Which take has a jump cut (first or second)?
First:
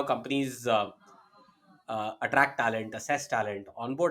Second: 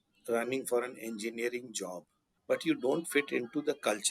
second